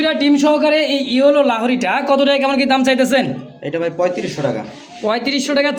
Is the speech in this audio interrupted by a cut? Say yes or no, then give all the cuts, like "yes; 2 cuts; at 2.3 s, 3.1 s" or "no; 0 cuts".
no; 0 cuts